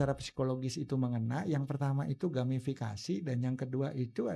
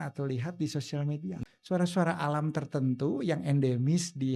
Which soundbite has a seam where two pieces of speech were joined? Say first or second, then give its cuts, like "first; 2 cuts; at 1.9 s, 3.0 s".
second; 1 cut; at 1.4 s